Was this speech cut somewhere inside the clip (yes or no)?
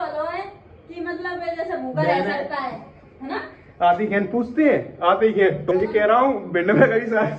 yes